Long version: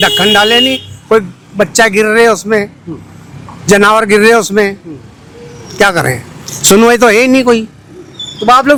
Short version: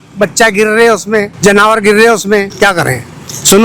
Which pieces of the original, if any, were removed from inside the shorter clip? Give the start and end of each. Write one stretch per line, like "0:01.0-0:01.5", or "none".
0:02.7-0:03.6
0:04.8-0:05.7